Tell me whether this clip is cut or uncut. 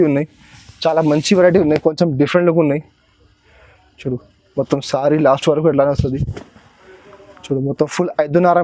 uncut